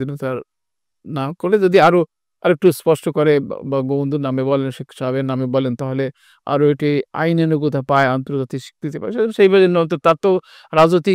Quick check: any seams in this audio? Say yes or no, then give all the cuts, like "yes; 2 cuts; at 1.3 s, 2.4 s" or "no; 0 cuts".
no; 0 cuts